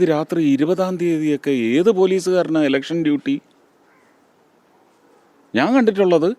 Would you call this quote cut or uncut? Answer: uncut